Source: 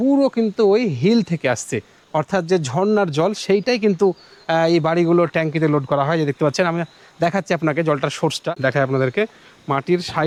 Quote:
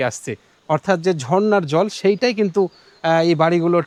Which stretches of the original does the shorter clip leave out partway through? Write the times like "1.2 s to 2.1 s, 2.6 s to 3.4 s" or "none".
none